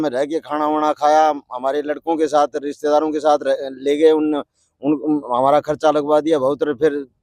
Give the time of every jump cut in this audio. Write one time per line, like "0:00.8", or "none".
none